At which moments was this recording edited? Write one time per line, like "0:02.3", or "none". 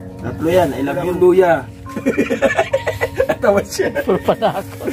0:01.0